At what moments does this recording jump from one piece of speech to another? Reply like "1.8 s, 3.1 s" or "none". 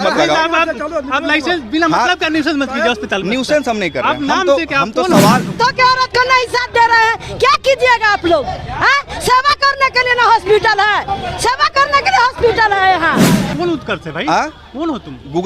5.5 s, 13.5 s